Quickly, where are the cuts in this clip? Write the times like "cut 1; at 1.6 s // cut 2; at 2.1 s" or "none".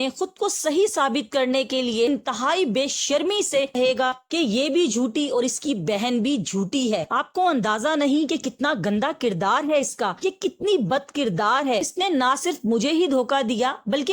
none